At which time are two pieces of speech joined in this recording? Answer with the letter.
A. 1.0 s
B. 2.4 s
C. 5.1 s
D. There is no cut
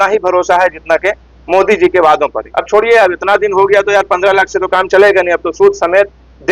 B